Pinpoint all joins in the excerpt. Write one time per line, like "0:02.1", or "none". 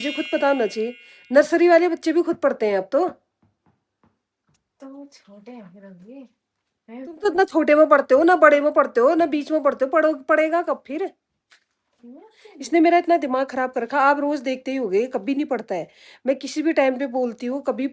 none